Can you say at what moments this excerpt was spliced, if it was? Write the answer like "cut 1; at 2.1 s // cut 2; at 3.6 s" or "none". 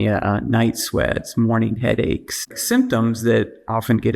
cut 1; at 2.4 s